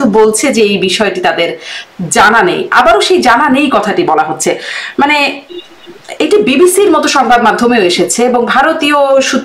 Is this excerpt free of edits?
yes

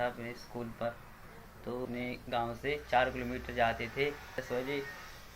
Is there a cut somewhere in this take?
yes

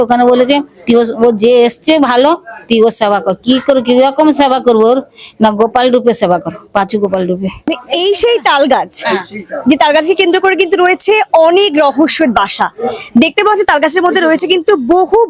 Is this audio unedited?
no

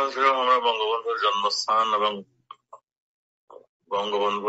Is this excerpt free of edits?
no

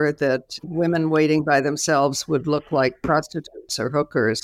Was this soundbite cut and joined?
no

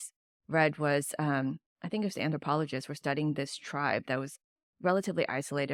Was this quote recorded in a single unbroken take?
yes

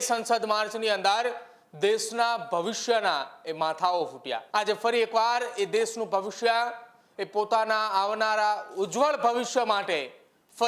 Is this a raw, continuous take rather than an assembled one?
no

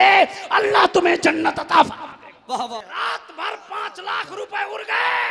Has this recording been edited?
yes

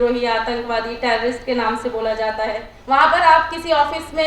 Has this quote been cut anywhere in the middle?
yes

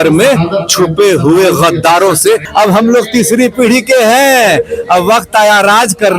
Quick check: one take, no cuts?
no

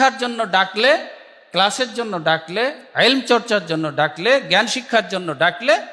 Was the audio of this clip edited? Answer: no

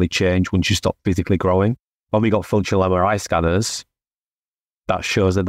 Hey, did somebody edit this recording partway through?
yes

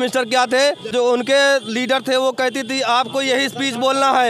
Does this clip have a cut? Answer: yes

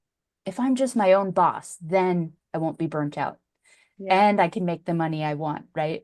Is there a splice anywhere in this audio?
no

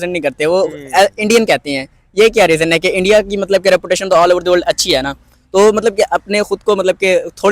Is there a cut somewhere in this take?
yes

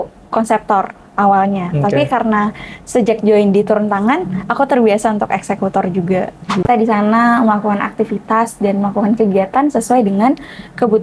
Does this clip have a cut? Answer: yes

